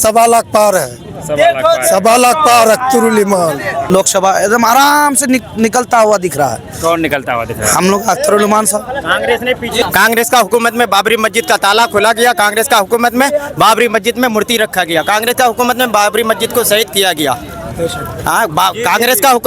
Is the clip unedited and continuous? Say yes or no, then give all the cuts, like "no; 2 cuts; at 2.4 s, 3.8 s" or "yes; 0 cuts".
no; 2 cuts; at 3.8 s, 9.8 s